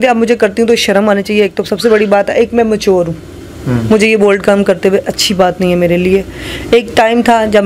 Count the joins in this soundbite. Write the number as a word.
zero